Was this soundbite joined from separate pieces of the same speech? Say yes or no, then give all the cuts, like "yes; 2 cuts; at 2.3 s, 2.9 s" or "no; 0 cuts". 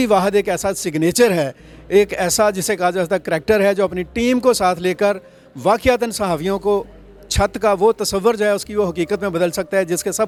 no; 0 cuts